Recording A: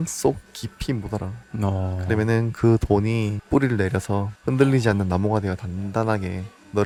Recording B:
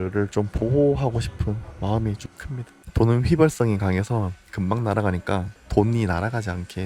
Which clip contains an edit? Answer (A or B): B